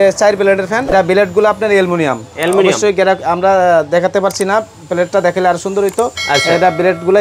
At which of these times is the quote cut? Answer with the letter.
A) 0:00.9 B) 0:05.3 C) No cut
A